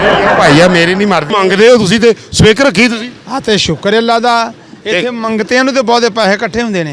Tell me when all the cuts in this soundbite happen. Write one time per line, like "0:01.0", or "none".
0:01.3